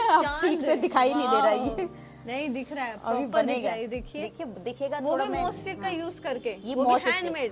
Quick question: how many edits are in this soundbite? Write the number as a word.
zero